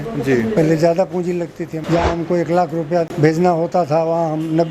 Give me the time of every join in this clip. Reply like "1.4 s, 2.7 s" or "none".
1.8 s, 3.1 s